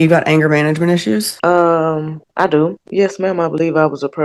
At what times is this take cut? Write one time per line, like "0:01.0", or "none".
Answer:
0:01.3
0:02.8